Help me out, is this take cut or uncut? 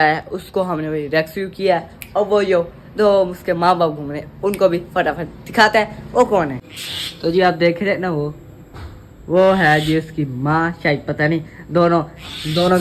uncut